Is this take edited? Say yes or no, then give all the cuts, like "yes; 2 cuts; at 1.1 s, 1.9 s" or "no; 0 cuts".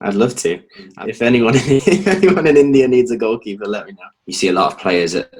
yes; 2 cuts; at 1.0 s, 4.2 s